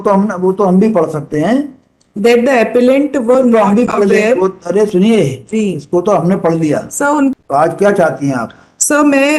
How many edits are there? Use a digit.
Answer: 1